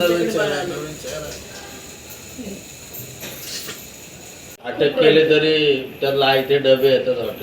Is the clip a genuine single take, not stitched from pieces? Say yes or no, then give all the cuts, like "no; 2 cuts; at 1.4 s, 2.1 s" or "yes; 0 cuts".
no; 1 cut; at 4.6 s